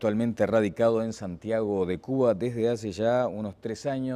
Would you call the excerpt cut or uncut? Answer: cut